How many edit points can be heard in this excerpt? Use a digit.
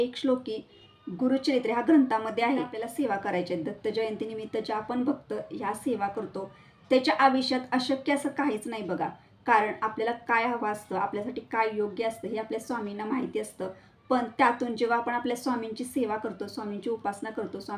1